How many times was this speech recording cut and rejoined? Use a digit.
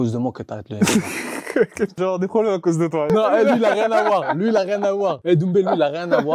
3